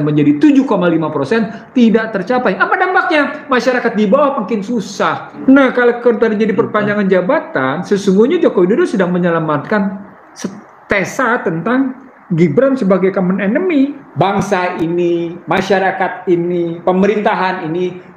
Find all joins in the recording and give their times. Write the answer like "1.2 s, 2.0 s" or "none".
5.3 s, 14.0 s